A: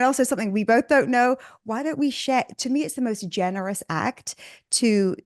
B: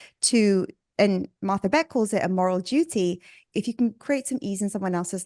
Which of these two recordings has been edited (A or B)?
B